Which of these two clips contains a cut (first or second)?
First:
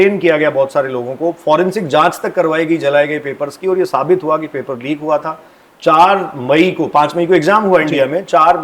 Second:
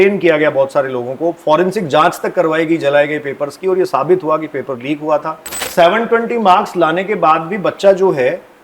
second